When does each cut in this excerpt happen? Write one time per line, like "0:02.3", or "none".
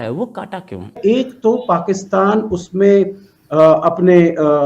0:01.0